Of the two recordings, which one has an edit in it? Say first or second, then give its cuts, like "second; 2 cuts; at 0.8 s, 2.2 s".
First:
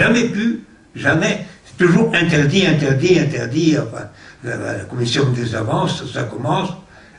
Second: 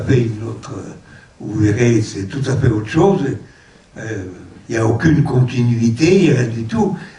first; 1 cut; at 6.1 s